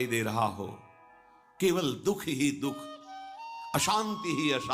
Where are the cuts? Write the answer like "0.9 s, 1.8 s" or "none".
none